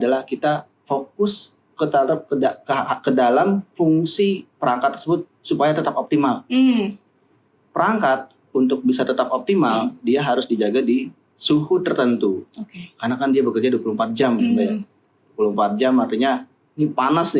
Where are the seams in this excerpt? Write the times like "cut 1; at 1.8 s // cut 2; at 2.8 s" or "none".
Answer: none